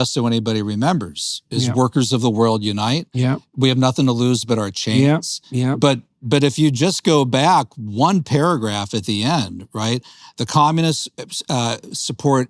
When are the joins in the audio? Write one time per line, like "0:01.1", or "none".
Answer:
0:06.2